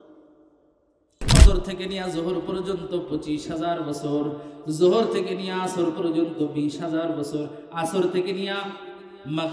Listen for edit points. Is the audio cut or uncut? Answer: cut